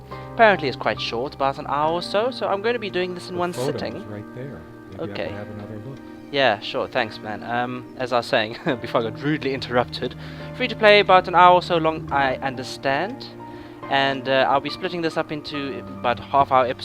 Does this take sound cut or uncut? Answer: cut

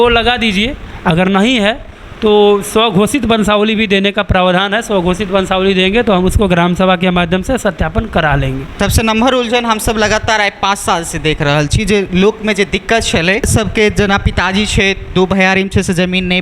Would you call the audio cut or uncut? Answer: cut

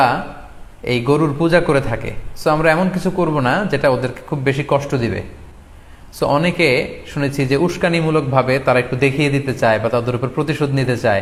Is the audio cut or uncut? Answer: uncut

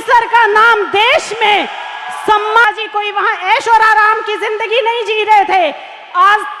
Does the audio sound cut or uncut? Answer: cut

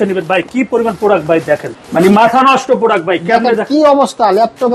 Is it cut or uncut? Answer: uncut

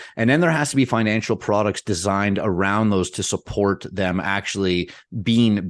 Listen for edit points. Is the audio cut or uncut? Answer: uncut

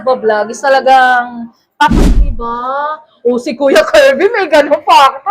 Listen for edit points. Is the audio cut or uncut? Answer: cut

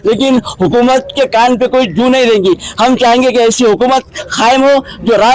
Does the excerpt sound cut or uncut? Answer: uncut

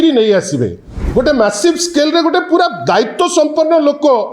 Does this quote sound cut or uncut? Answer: cut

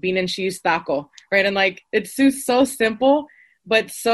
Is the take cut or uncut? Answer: uncut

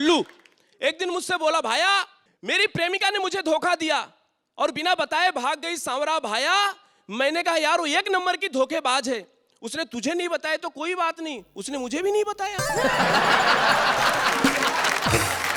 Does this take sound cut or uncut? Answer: uncut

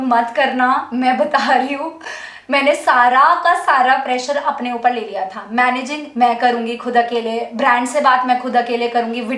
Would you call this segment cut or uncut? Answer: uncut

